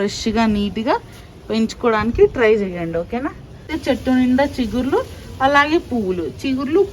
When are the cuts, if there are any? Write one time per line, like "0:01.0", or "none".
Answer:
0:03.7